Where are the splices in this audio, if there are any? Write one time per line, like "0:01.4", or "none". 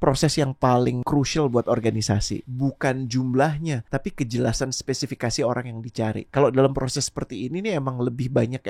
0:01.0
0:02.4
0:03.8
0:06.2